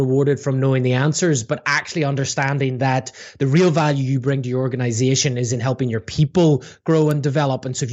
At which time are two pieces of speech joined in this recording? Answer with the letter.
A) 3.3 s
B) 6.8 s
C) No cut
C